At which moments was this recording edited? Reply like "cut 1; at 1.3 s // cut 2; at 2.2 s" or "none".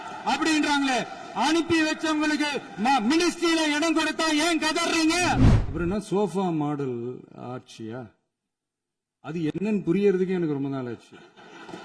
cut 1; at 5.6 s